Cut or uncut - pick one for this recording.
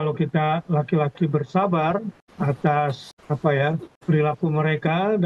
cut